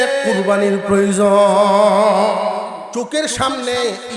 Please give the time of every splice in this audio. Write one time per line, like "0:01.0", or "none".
0:02.8